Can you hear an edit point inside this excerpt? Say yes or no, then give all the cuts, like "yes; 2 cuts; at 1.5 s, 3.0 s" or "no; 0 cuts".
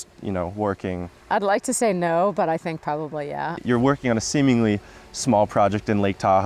yes; 2 cuts; at 1.1 s, 3.5 s